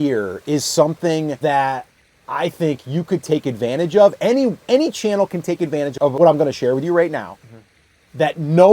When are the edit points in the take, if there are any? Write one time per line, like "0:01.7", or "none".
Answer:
0:01.4
0:06.0